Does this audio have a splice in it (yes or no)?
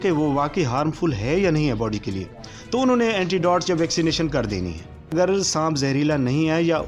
yes